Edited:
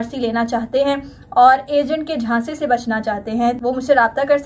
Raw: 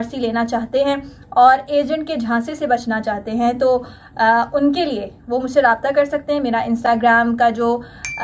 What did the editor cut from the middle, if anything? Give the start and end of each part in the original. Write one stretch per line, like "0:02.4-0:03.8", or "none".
0:03.6-0:05.2